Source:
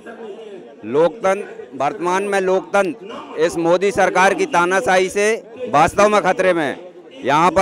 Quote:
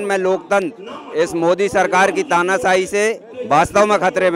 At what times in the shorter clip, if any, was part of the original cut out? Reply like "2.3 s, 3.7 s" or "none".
none